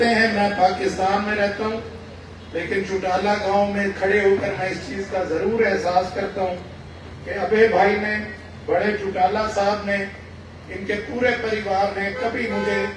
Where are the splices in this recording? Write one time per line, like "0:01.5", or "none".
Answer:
none